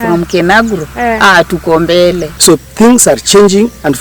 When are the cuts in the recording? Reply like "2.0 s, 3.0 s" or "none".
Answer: 2.3 s